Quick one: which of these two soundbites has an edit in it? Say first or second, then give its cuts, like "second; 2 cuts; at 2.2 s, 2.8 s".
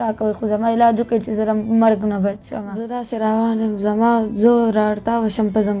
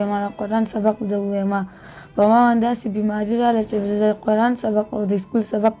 first; 1 cut; at 3.0 s